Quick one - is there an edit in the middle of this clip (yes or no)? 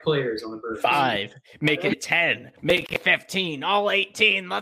no